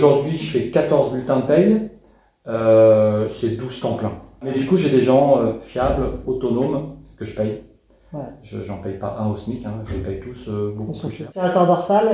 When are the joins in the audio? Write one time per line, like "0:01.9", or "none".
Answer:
0:04.5
0:11.2